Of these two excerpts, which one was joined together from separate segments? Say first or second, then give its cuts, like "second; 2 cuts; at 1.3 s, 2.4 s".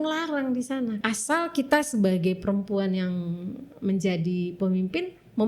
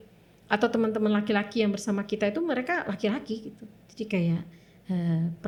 first; 1 cut; at 1.0 s